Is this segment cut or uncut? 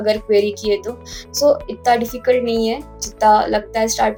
uncut